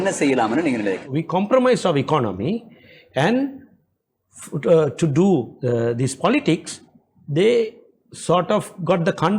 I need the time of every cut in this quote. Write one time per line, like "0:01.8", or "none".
0:01.1